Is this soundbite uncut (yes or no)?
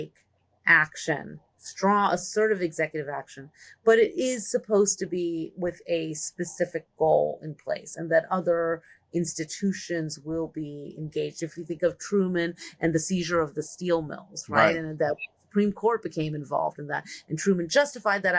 yes